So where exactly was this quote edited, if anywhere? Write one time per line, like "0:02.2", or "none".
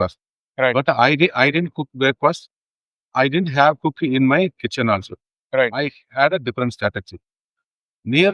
none